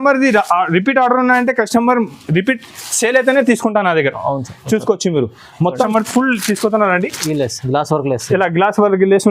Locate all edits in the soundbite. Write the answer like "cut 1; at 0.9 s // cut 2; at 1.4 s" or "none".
cut 1; at 5.9 s